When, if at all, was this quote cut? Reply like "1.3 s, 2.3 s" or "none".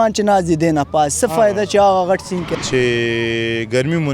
2.5 s